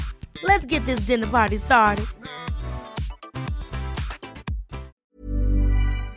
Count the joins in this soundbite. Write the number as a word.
one